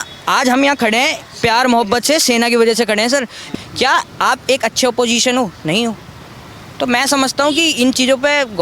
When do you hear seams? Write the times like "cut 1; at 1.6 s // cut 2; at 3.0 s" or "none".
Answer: cut 1; at 3.4 s